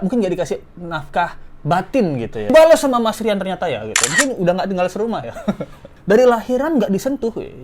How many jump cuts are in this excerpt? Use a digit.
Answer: 1